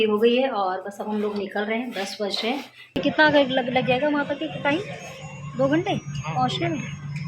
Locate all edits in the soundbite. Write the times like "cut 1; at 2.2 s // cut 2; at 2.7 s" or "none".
cut 1; at 3.0 s